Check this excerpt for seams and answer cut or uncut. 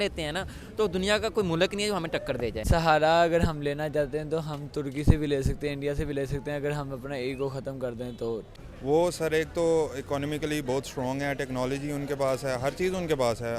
cut